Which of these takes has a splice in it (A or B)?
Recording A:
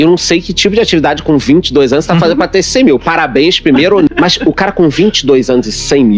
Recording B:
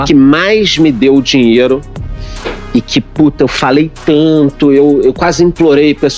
A